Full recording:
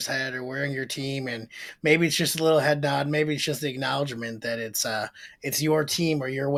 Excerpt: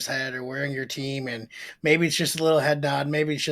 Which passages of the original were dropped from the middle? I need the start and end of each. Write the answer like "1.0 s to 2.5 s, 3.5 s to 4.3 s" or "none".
none